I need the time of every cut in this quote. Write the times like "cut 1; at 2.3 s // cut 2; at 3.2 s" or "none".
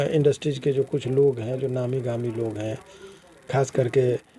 none